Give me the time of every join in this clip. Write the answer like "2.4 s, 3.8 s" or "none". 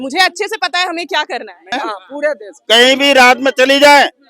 1.7 s